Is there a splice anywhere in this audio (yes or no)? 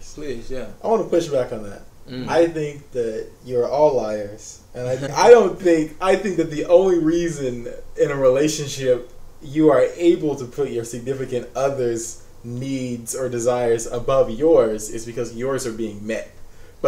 yes